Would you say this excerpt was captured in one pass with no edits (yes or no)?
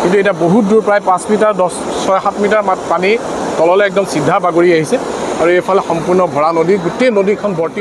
yes